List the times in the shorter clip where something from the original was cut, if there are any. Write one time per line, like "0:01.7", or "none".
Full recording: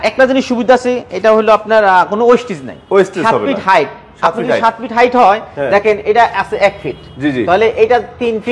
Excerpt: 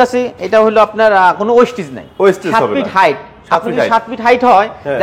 none